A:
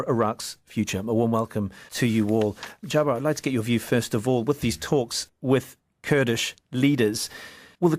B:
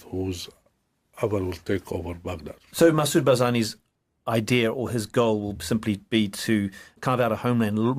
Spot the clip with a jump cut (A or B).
B